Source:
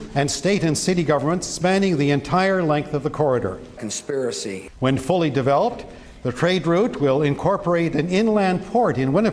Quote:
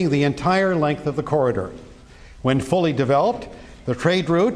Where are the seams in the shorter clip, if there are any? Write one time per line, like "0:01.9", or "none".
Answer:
0:02.1